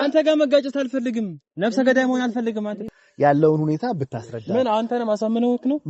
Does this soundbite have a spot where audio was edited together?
yes; 1 cut; at 2.8 s

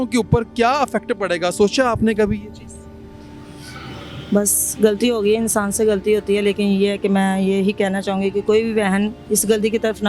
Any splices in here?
no; 0 cuts

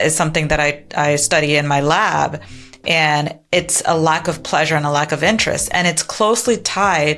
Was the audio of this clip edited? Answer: no; 0 cuts

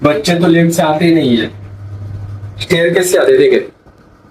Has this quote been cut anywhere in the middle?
no; 0 cuts

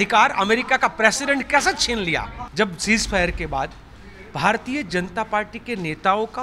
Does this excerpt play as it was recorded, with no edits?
no; 1 cut; at 2.4 s

